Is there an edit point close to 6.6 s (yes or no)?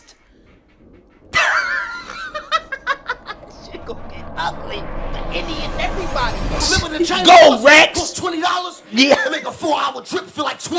yes